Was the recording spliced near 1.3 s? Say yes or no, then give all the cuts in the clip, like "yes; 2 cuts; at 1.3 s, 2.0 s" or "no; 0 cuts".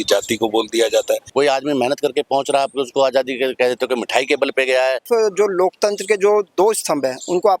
yes; 2 cuts; at 1.3 s, 5.0 s